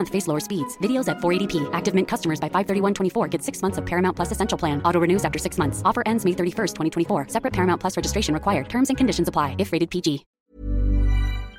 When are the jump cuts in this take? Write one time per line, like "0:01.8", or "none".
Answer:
0:10.3